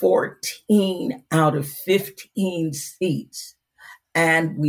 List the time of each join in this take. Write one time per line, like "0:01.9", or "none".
none